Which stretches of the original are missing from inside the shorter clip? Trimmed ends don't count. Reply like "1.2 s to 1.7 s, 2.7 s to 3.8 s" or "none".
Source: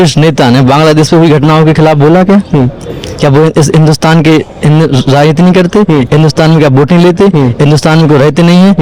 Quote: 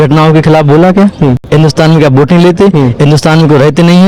2.8 s to 6.1 s